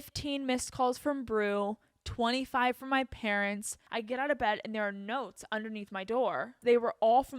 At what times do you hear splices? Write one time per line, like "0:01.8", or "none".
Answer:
0:03.7
0:06.6